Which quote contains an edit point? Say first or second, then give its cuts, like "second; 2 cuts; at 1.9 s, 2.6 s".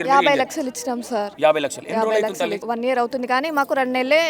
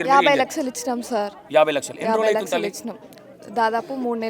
first; 2 cuts; at 1.3 s, 2.6 s